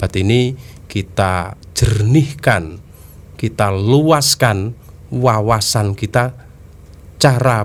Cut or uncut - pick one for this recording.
uncut